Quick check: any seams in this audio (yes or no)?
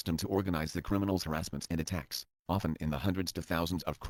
no